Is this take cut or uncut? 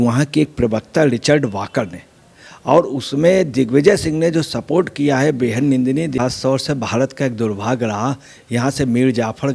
cut